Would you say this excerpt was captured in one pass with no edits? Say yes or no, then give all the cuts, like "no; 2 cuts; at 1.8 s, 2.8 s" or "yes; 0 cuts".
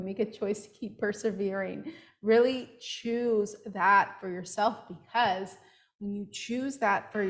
yes; 0 cuts